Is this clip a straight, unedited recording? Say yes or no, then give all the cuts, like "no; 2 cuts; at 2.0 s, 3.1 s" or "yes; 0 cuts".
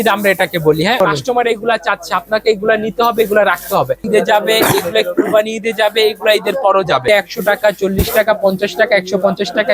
no; 3 cuts; at 1.0 s, 4.0 s, 7.0 s